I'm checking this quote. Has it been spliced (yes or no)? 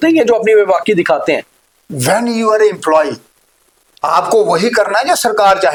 no